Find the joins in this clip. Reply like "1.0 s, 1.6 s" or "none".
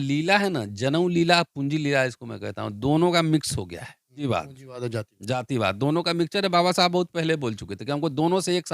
4.2 s

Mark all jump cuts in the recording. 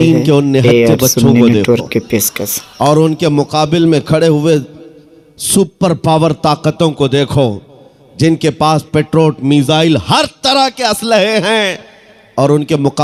none

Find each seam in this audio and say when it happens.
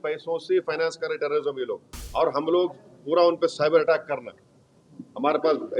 1.9 s

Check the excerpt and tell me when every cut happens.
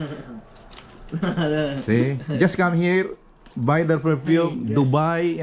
none

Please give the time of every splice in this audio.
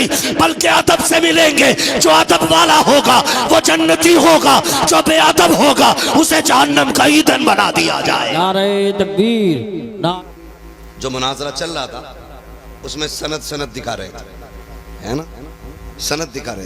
10.2 s

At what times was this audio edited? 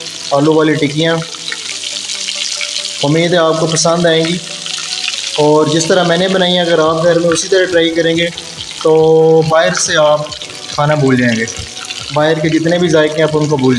none

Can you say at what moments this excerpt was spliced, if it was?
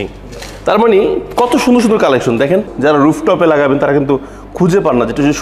2.7 s

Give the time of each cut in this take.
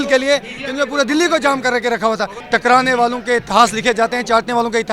2.3 s

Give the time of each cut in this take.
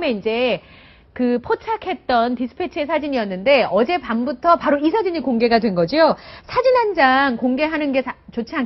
none

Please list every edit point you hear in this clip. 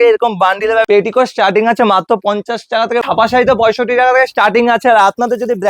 0.9 s, 3.0 s

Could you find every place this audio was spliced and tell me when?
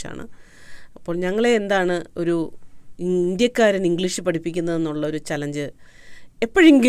none

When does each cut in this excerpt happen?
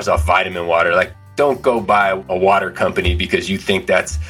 1.2 s, 2.2 s

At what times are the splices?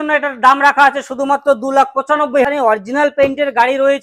2.4 s

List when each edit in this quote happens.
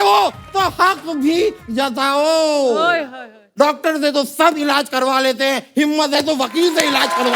none

